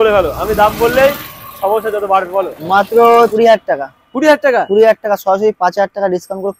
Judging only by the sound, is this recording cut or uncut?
cut